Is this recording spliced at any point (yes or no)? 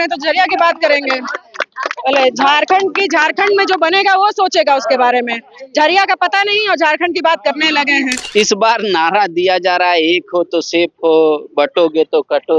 yes